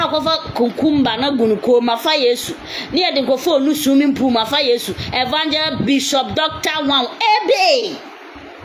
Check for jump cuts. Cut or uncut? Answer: uncut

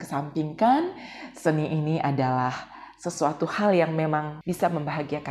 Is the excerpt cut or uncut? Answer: cut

